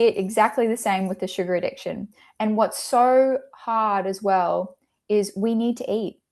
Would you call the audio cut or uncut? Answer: uncut